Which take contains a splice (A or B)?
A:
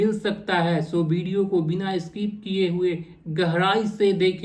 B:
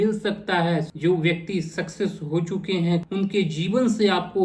B